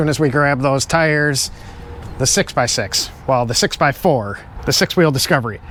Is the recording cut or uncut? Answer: uncut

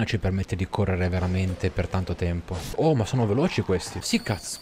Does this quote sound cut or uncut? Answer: cut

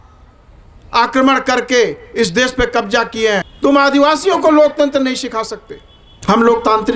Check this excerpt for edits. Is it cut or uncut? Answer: cut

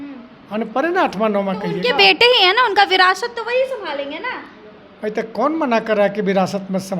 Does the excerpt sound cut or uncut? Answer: uncut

